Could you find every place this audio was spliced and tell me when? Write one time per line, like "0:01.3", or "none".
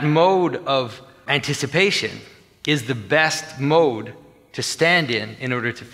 0:01.2